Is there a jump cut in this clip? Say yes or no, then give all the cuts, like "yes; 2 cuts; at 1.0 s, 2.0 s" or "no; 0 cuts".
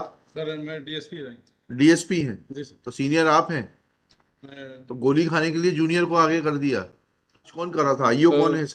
yes; 1 cut; at 7.6 s